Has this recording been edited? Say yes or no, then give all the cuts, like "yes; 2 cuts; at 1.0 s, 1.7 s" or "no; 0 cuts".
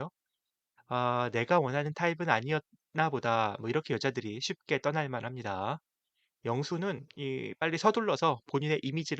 no; 0 cuts